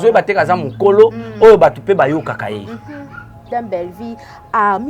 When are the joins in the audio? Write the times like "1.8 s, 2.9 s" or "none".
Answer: 3.5 s